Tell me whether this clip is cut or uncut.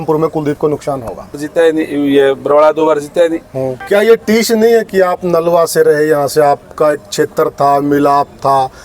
cut